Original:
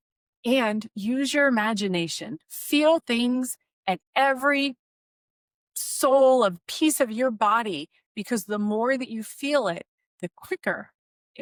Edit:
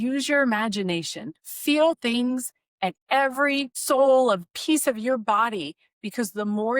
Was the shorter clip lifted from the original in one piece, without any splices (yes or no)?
no